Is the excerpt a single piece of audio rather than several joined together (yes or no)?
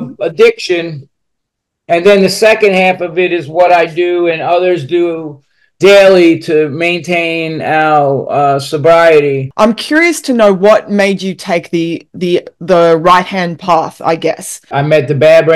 no